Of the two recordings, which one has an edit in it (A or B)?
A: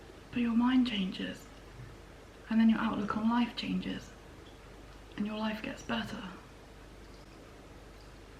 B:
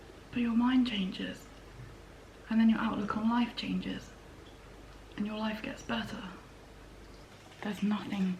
B